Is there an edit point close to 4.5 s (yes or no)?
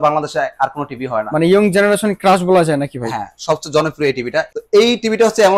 yes